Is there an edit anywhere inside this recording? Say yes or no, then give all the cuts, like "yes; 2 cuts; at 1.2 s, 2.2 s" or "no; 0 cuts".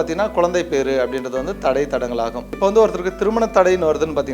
yes; 1 cut; at 2.5 s